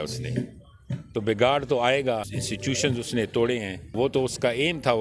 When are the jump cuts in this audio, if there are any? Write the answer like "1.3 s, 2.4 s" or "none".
2.3 s, 3.9 s

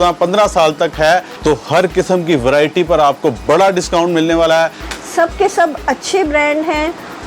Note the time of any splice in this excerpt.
1.3 s, 4.8 s

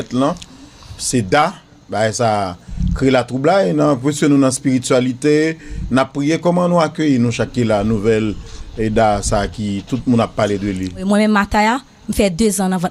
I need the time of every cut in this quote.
11.0 s

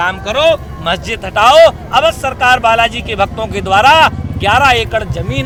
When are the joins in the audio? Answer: none

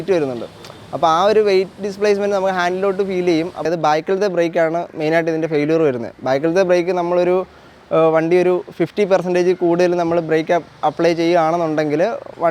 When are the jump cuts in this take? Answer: 3.6 s

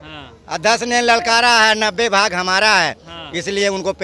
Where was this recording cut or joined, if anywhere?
none

